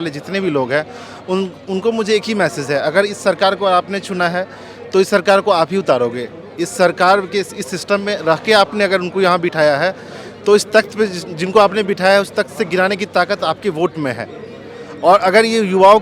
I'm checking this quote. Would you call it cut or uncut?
uncut